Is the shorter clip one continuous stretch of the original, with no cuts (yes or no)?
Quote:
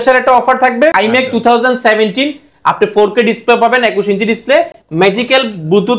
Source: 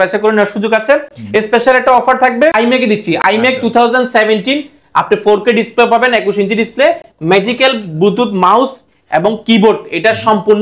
no